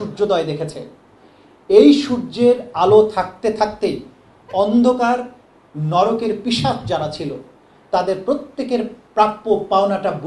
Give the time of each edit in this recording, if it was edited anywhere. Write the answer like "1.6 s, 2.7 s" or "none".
none